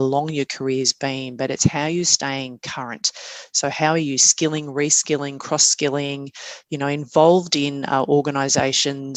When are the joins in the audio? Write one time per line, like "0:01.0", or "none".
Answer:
none